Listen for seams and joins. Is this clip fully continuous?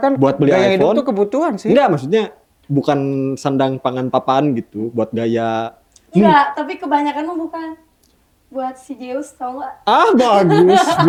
yes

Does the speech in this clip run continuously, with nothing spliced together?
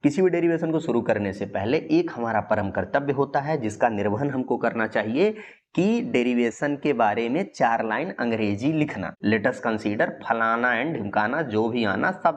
yes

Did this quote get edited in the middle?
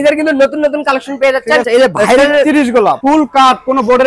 yes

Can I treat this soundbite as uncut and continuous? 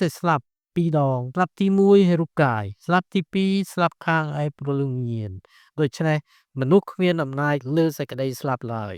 no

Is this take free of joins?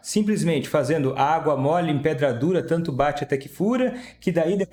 yes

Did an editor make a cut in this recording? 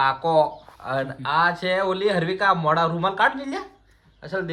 no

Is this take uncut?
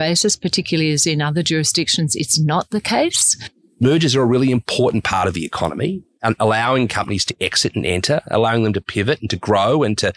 no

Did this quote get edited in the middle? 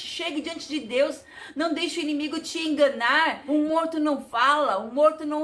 yes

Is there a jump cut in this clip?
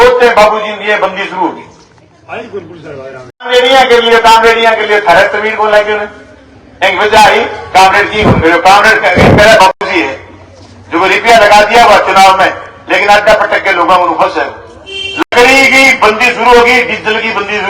yes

